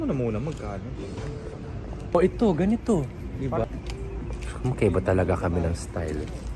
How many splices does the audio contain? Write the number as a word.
two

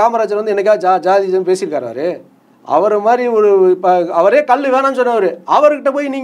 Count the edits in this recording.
zero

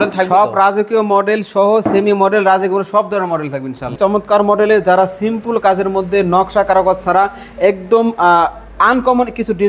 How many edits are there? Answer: one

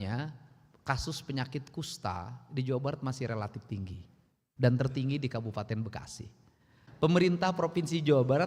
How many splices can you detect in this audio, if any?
one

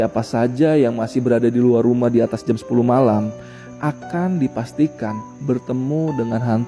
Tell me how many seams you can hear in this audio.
zero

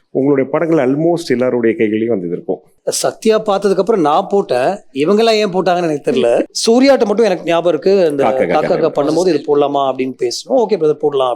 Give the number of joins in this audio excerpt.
one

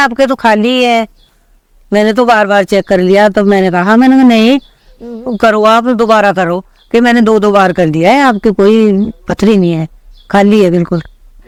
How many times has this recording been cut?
zero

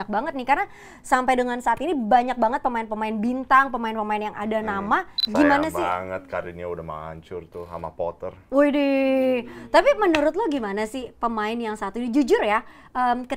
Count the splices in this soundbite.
one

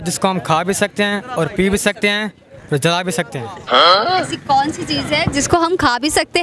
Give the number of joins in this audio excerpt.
zero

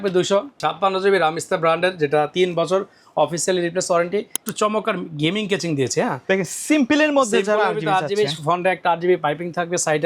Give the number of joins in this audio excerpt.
one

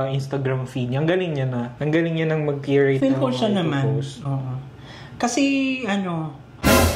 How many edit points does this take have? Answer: one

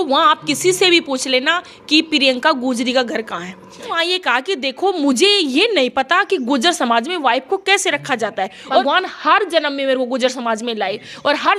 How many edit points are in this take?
two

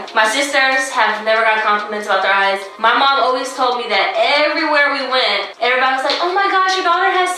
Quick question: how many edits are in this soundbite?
one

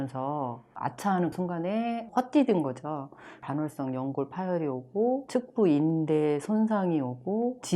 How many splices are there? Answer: two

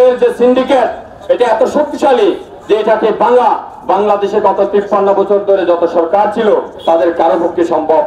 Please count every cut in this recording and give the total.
zero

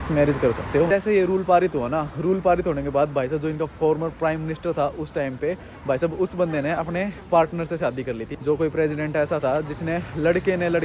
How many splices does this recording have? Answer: two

